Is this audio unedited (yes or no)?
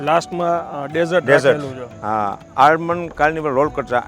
yes